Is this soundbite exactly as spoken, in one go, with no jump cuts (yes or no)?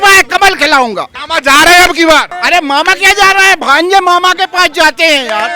no